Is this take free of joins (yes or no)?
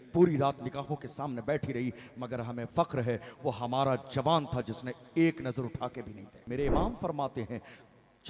no